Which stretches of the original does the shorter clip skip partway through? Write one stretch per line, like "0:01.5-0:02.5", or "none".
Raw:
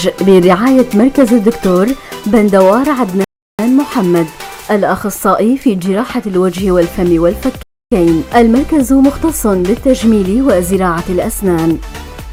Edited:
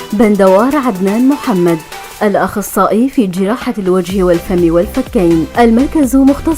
0:03.3-0:03.6
0:07.5-0:07.8